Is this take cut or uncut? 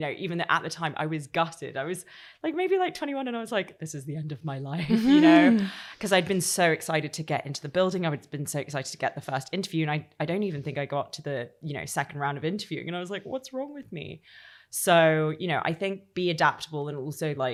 uncut